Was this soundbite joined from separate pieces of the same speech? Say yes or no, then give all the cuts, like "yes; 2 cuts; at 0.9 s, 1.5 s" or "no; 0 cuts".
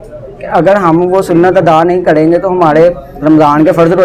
no; 0 cuts